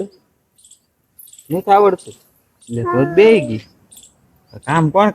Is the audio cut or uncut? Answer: uncut